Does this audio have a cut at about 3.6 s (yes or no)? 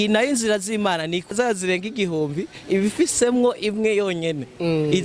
no